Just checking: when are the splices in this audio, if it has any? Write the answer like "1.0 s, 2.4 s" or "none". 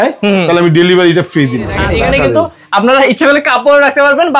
1.8 s